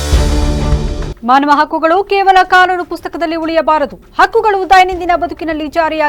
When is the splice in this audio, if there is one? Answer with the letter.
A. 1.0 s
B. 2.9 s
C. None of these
A